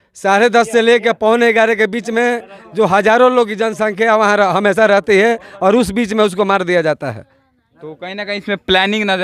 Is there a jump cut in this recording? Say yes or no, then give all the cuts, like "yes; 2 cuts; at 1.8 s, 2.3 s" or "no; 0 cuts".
no; 0 cuts